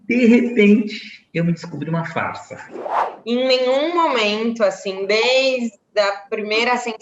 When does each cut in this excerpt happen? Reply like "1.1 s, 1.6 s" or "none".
2.9 s